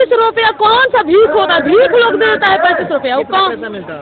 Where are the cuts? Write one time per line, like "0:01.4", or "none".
none